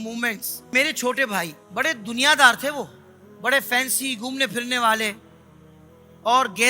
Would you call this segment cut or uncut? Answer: cut